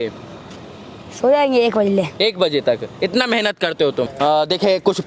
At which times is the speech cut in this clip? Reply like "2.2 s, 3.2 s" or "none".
4.1 s